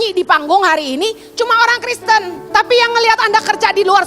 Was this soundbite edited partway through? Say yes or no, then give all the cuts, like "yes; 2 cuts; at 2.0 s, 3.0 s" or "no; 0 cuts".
yes; 1 cut; at 2.4 s